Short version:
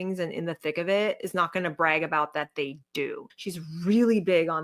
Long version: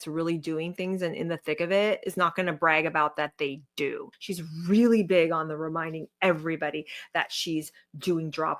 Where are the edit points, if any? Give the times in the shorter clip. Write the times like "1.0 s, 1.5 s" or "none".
none